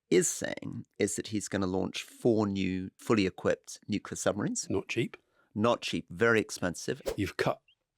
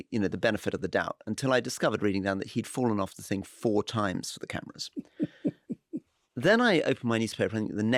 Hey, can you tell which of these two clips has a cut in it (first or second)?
first